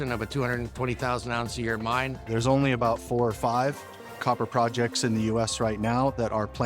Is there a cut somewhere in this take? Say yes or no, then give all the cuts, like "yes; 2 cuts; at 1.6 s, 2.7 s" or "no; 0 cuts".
yes; 1 cut; at 2.2 s